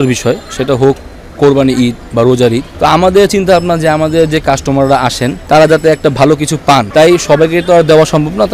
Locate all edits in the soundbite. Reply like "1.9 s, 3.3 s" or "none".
2.7 s, 5.3 s, 6.9 s